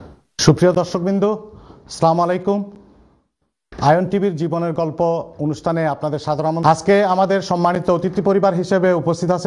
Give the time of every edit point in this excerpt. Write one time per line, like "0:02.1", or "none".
0:06.6